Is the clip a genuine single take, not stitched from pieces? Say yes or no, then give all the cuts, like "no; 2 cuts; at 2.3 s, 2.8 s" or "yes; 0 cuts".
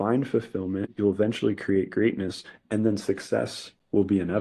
no; 1 cut; at 0.9 s